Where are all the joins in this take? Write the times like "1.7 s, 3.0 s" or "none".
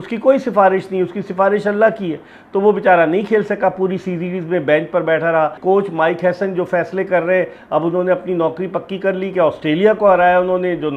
5.6 s